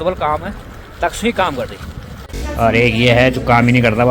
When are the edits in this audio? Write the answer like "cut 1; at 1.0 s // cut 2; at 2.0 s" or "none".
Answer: cut 1; at 2.1 s